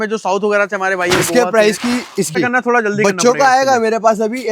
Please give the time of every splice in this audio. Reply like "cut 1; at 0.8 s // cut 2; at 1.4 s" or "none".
cut 1; at 2.3 s